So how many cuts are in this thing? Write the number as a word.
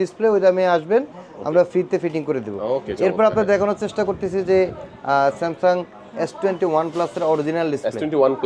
zero